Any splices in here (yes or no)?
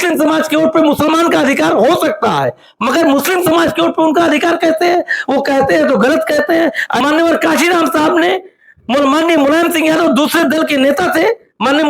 yes